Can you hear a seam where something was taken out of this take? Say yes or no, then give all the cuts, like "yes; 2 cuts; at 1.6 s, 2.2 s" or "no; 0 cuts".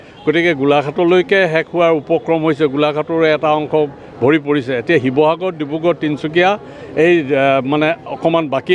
no; 0 cuts